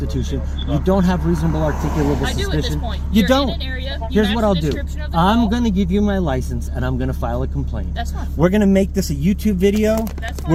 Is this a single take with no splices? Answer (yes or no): yes